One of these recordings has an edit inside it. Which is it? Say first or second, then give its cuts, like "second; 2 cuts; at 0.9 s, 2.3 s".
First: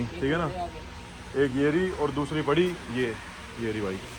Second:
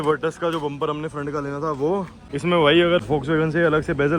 second; 2 cuts; at 2.2 s, 3.0 s